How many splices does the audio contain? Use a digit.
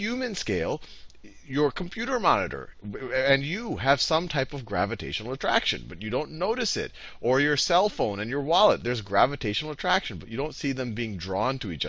1